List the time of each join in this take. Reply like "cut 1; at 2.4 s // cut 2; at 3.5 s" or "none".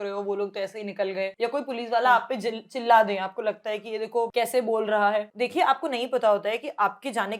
cut 1; at 1.3 s // cut 2; at 4.3 s // cut 3; at 5.3 s